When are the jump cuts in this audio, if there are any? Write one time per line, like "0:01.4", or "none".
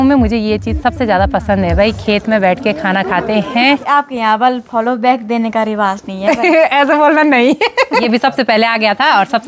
0:03.8
0:08.0